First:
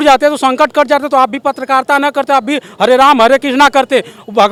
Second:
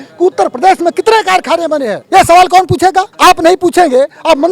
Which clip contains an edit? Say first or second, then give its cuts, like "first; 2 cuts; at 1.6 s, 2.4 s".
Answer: second; 2 cuts; at 2.0 s, 3.1 s